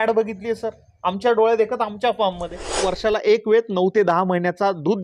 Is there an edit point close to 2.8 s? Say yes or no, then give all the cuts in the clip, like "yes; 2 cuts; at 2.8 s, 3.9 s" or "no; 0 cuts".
yes; 1 cut; at 2.8 s